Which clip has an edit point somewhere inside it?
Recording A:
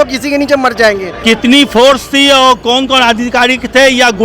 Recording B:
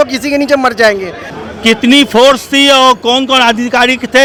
A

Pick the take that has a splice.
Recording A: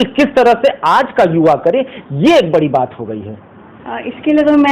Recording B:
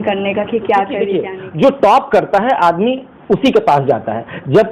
B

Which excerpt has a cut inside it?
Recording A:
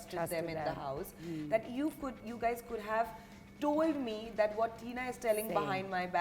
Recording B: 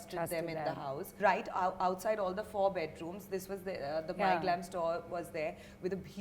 B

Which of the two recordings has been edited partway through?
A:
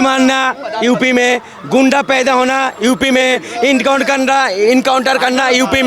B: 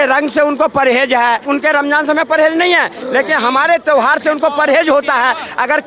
B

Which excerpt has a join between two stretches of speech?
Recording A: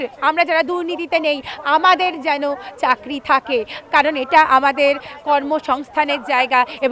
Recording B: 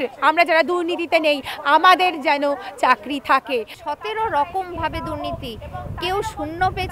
B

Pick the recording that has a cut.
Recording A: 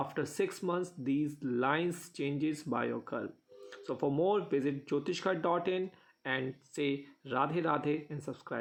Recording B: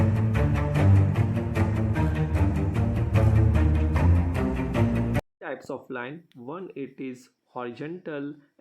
B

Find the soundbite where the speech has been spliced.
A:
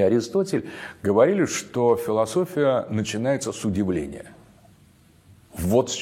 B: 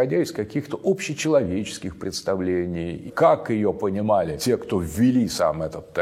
B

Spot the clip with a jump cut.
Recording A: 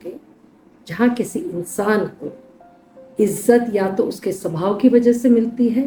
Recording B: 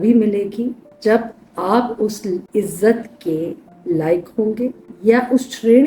B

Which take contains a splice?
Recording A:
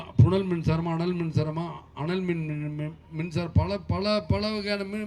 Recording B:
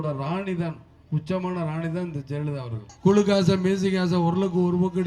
B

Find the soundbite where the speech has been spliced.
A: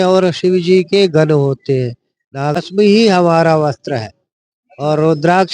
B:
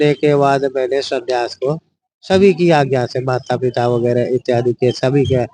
A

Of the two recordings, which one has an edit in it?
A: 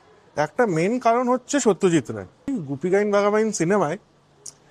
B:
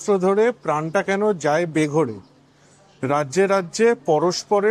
A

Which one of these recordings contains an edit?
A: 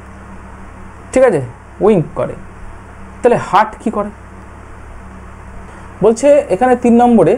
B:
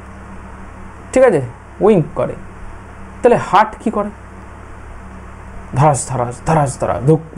A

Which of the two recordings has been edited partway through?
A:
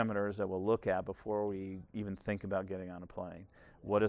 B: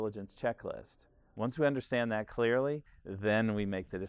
A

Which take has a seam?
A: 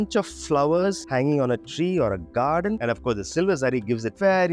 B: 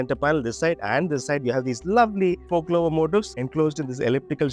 A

